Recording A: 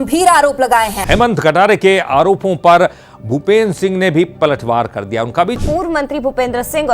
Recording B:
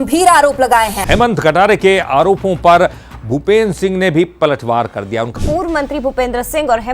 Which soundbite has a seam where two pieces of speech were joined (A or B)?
B